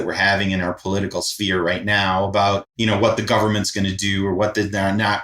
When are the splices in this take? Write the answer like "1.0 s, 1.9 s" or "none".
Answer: 2.7 s